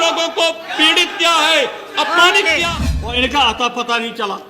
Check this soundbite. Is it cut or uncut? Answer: cut